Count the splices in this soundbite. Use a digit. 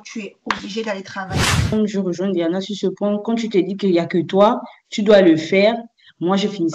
1